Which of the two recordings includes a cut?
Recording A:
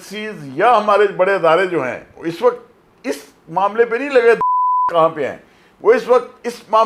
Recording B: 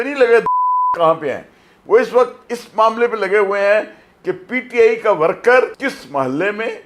B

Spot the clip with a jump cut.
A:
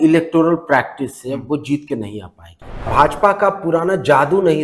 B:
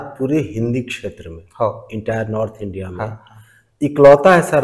A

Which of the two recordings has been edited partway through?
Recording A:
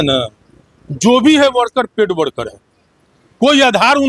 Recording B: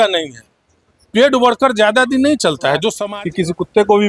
B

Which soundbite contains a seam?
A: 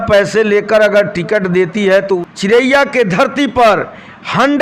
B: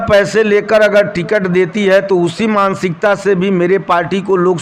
A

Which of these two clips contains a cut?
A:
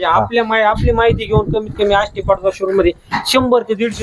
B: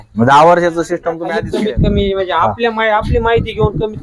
B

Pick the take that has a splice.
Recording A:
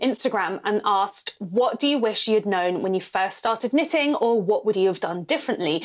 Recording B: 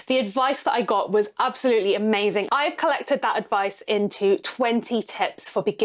B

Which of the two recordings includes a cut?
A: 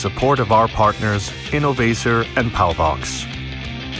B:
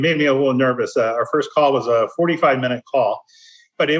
A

